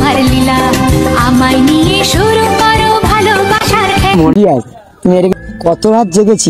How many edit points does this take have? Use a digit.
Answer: 1